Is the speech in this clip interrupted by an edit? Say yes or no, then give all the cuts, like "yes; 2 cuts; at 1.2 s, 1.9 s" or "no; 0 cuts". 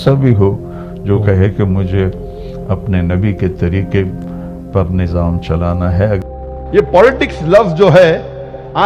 no; 0 cuts